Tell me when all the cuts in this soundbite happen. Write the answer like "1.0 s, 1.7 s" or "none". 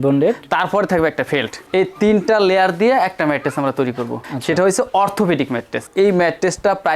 none